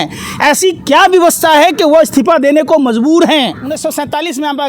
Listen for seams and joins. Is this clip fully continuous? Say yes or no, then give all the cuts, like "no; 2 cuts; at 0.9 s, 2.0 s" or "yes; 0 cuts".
no; 1 cut; at 3.6 s